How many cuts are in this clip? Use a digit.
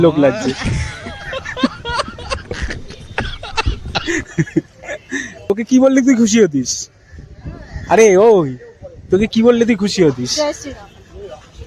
1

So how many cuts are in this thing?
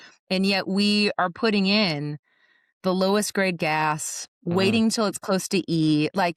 0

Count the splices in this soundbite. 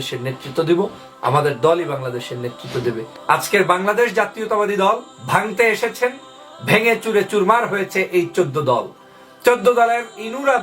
2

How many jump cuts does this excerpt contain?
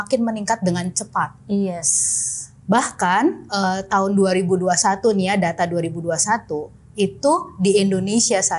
0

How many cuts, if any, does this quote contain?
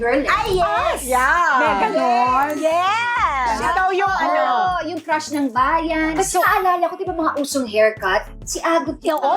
2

